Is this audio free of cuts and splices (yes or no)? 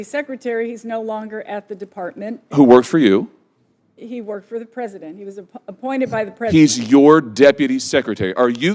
yes